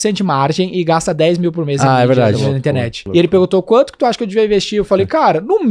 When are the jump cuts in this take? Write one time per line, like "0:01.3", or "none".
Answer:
0:02.9